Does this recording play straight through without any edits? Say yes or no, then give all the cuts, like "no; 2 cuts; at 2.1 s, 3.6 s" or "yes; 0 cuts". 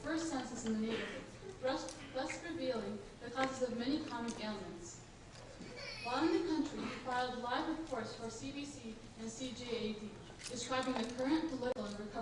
yes; 0 cuts